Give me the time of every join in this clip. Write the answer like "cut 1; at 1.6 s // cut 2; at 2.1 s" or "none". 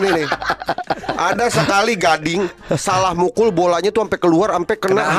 cut 1; at 1.0 s